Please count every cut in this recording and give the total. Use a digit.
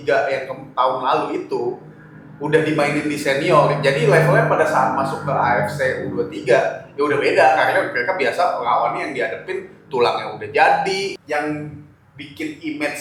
1